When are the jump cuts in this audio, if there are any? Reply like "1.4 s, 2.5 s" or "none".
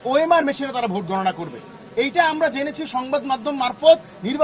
none